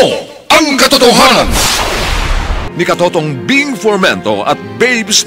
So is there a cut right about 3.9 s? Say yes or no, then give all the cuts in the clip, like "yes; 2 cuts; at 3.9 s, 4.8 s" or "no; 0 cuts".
no; 1 cut; at 2.6 s